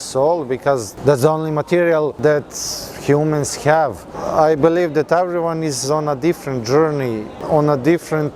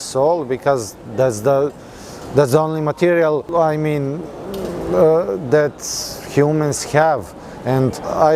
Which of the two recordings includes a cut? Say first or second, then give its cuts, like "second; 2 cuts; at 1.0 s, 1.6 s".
first; 4 cuts; at 0.9 s, 2.1 s, 4.2 s, 7.3 s